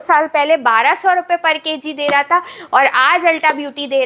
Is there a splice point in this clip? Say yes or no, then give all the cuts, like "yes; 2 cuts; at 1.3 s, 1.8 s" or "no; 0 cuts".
no; 0 cuts